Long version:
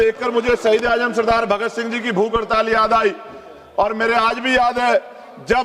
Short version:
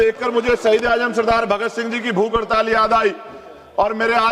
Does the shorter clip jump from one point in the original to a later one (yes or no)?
no